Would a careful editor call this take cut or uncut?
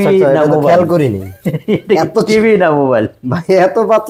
uncut